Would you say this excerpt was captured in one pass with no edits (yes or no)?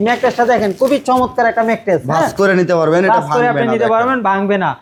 yes